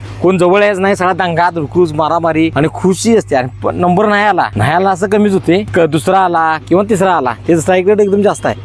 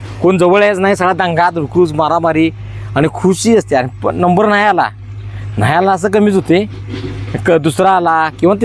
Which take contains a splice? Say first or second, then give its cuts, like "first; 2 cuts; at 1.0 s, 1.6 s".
first; 3 cuts; at 2.5 s, 4.6 s, 5.7 s